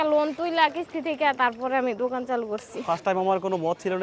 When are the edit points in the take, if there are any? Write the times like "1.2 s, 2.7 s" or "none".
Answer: 2.7 s